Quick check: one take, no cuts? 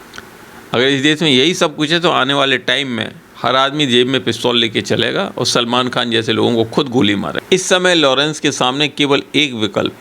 no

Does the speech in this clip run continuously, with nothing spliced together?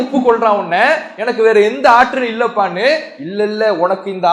yes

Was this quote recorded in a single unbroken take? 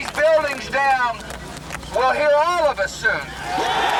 yes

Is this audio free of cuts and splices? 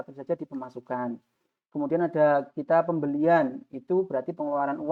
yes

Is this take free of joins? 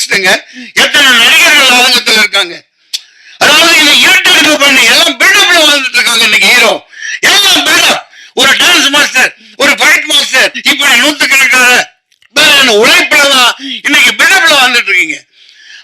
no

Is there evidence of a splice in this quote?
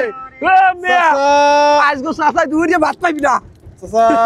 no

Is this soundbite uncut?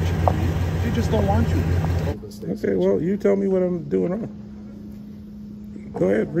no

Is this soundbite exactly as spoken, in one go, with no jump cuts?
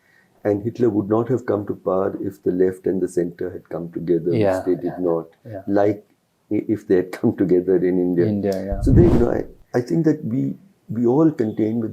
no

